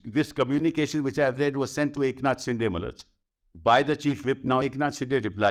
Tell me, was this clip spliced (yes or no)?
no